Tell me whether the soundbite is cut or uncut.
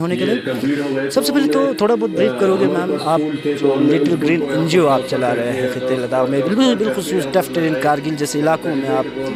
uncut